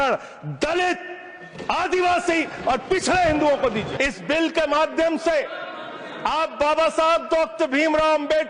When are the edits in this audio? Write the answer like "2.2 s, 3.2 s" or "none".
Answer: 3.9 s